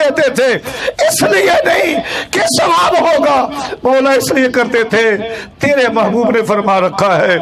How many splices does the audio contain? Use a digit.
0